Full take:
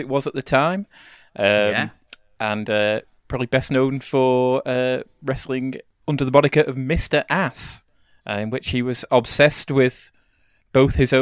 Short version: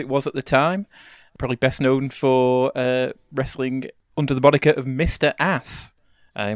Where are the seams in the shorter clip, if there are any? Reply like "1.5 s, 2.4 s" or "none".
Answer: 1.2 s